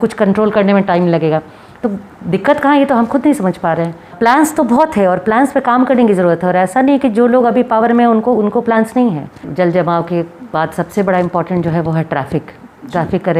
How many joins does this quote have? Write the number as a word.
two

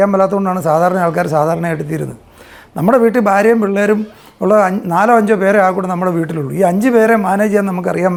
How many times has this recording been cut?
zero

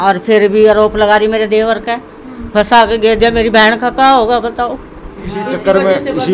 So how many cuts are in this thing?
one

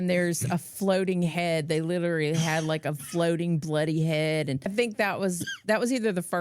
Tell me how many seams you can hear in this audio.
one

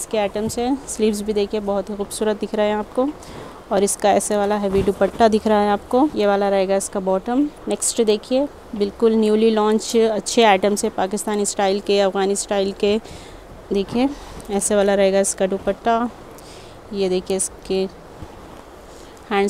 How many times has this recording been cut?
zero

